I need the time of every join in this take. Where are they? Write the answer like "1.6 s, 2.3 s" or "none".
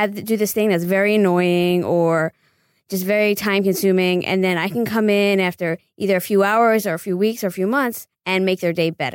8.1 s

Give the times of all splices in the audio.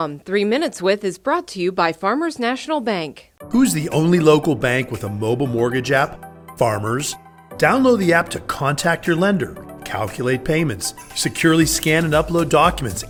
none

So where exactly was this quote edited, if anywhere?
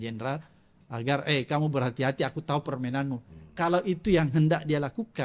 none

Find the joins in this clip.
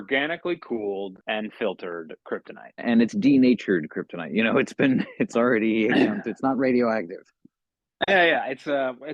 1.2 s, 2.8 s

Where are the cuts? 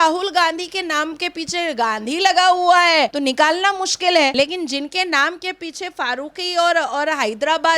none

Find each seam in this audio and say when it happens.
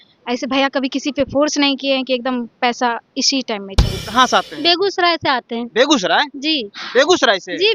3.9 s

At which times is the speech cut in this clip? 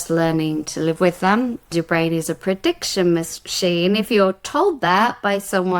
1.7 s

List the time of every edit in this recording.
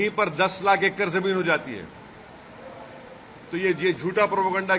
none

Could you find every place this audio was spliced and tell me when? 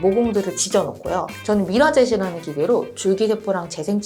1.3 s

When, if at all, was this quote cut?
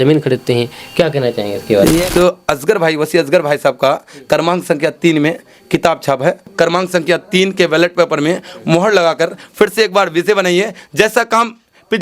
2.1 s, 6.5 s

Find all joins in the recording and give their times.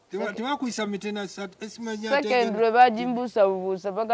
none

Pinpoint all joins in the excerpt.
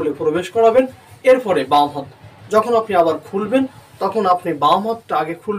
none

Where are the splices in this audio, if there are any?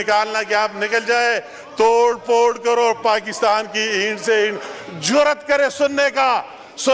none

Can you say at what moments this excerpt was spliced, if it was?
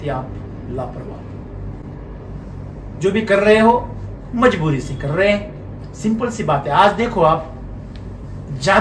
none

